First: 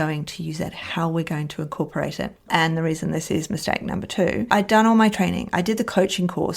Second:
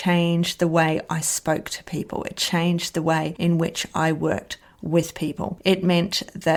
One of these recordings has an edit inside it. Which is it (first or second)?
first